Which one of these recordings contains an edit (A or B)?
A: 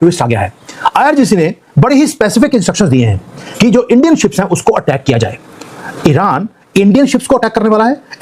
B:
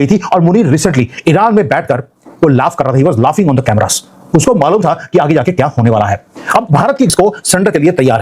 B